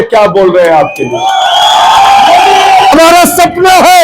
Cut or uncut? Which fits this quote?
cut